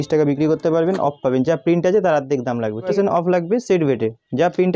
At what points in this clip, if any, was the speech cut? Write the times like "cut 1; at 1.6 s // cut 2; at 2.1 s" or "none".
cut 1; at 1.0 s // cut 2; at 2.9 s